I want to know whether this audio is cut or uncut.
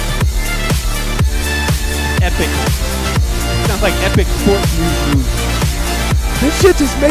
cut